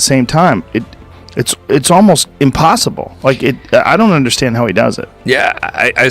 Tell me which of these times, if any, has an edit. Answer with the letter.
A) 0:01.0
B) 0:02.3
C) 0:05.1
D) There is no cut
B